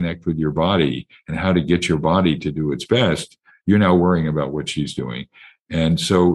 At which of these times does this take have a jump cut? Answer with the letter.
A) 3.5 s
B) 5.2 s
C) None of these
C